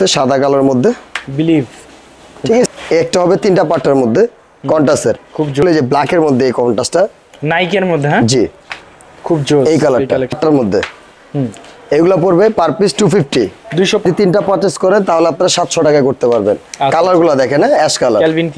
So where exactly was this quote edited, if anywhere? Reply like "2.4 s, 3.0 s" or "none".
2.7 s, 5.6 s, 10.4 s, 14.0 s